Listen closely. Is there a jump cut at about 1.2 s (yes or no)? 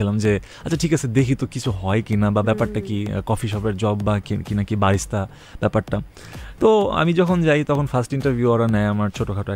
no